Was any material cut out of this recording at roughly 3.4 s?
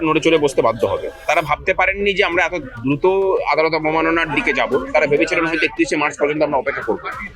no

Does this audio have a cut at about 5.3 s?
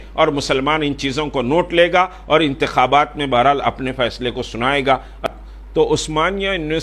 yes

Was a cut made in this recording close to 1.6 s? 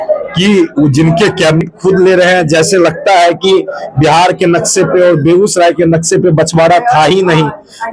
yes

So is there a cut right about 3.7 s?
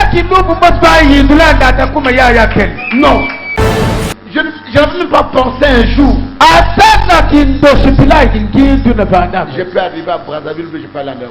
yes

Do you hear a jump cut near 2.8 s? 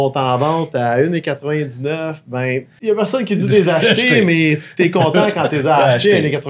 yes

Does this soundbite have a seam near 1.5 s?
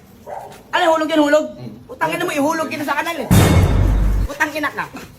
no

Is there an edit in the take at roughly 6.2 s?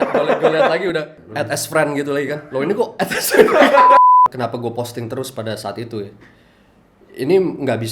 no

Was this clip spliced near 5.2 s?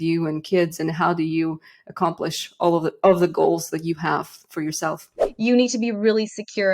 yes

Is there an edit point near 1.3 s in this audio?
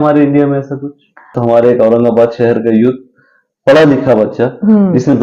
yes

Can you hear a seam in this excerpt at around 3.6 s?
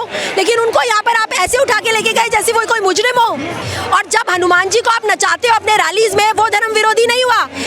yes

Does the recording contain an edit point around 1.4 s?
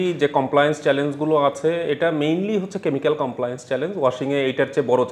no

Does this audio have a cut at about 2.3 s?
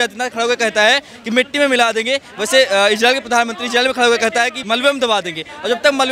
no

